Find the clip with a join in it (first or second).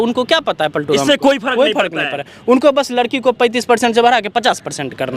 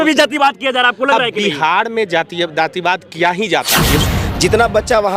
second